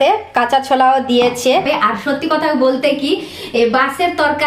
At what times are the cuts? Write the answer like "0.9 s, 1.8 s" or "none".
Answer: 1.6 s